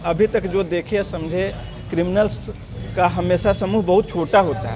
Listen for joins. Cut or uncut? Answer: uncut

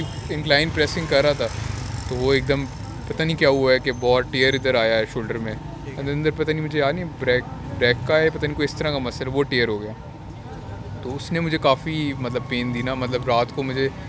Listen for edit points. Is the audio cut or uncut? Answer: uncut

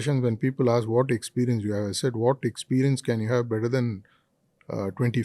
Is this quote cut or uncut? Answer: uncut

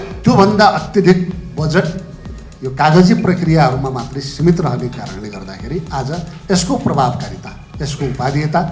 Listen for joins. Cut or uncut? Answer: uncut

